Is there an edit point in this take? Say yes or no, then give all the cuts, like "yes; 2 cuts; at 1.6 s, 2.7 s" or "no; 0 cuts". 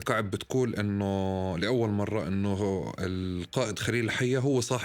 no; 0 cuts